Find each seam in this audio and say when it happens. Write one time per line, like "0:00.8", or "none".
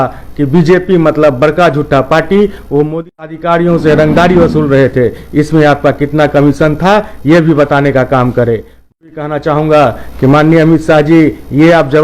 0:03.3
0:09.1